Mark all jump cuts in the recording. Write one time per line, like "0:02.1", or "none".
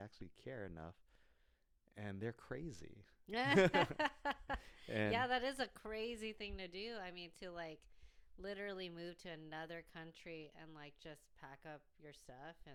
none